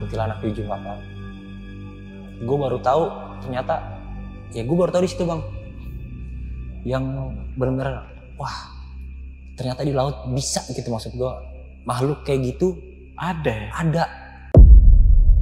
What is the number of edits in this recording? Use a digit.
1